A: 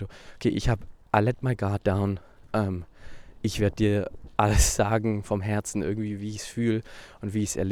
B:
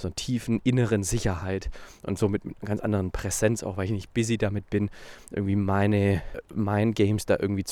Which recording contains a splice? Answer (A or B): B